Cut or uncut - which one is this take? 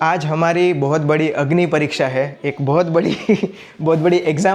uncut